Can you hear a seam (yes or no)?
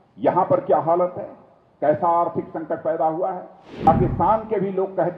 yes